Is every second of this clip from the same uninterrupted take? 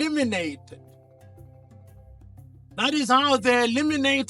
no; 2 cuts; at 1.0 s, 2.8 s

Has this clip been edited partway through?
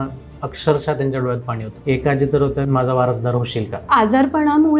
yes; 3 cuts; at 1.7 s, 2.6 s, 3.8 s

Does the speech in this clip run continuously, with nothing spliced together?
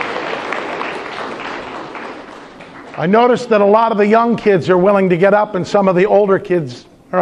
yes; 0 cuts

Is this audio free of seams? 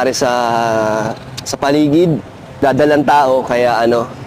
no; 1 cut; at 2.6 s

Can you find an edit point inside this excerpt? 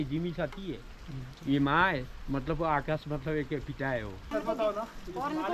yes; 1 cut; at 4.3 s

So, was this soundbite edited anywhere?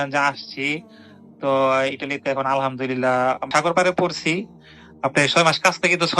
yes; 1 cut; at 3.5 s

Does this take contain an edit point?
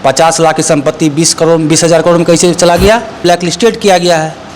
yes; 1 cut; at 3.2 s

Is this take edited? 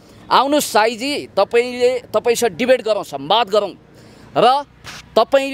no; 0 cuts

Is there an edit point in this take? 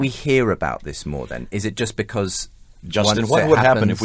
yes; 1 cut; at 1.4 s

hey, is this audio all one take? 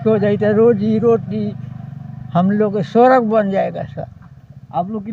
yes; 0 cuts

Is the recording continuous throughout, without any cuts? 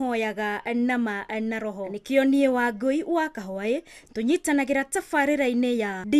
yes; 0 cuts

